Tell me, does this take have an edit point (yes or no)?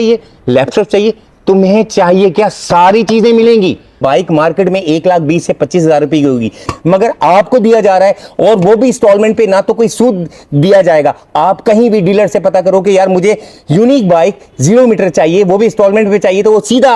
yes